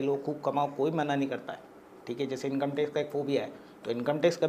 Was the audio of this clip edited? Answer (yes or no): no